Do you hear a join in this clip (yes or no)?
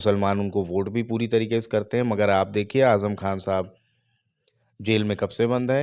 no